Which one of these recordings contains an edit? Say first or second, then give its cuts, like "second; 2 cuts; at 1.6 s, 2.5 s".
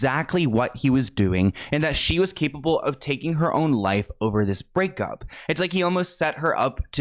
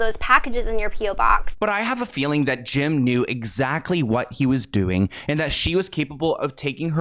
second; 1 cut; at 1.5 s